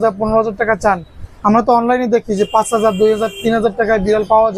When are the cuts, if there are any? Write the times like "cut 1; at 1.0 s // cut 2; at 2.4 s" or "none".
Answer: none

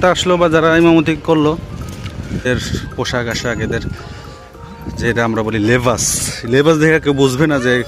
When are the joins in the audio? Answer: cut 1; at 2.4 s

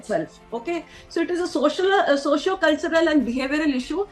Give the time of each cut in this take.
none

